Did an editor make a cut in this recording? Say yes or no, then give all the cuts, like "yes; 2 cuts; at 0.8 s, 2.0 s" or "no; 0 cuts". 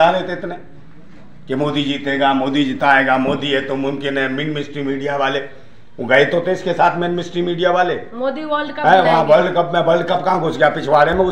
no; 0 cuts